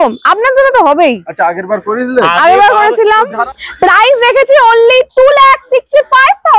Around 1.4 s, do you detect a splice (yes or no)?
no